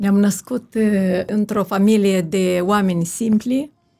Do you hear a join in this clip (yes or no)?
yes